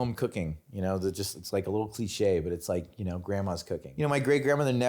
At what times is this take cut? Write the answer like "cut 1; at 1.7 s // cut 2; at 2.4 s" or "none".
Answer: cut 1; at 3.9 s